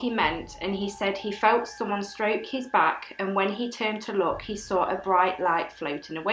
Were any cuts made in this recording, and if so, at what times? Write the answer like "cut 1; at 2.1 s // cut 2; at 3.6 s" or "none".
none